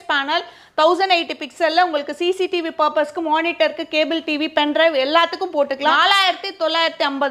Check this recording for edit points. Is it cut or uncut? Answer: cut